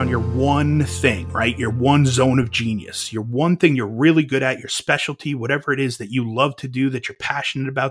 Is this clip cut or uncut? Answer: uncut